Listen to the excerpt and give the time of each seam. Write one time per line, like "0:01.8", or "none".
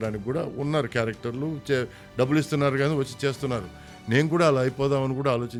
none

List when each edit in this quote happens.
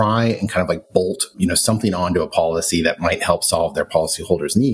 0:01.3

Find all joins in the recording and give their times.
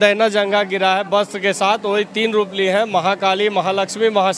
none

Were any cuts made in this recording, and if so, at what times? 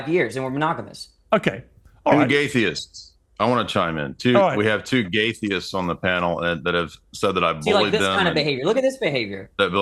none

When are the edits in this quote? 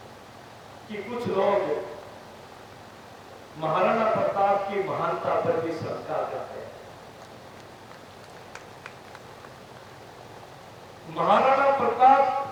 none

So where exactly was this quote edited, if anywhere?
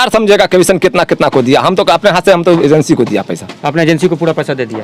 none

